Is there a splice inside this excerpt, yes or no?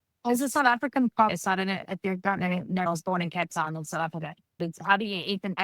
yes